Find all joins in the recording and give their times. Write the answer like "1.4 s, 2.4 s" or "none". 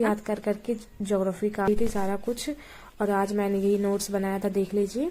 1.7 s